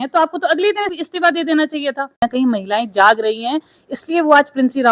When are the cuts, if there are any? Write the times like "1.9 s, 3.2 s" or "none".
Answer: 0.9 s, 2.2 s